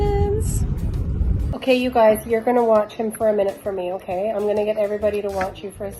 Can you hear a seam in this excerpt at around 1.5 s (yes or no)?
yes